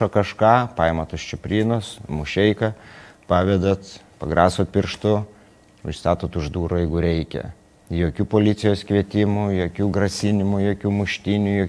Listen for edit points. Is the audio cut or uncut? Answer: uncut